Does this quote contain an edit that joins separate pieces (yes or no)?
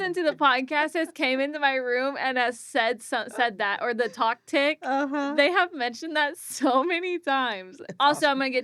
yes